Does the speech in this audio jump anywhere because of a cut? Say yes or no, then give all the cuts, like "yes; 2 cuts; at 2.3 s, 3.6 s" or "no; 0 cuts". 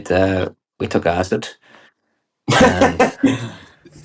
no; 0 cuts